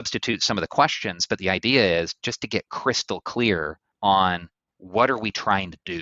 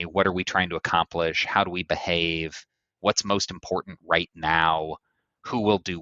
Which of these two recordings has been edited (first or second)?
first